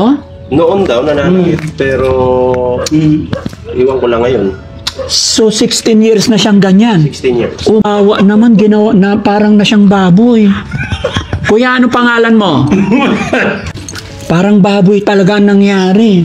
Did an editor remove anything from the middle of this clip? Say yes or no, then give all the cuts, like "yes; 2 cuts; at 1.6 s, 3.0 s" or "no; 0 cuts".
yes; 2 cuts; at 7.8 s, 13.7 s